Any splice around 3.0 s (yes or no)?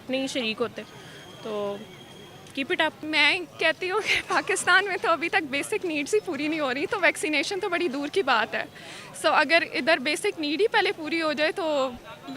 yes